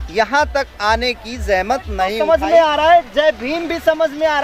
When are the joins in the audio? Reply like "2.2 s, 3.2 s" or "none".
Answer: 2.0 s